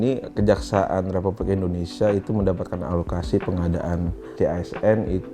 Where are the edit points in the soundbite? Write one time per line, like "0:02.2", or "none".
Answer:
0:04.2